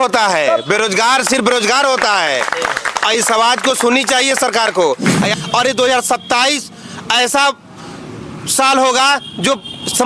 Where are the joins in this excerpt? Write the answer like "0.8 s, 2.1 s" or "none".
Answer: 5.3 s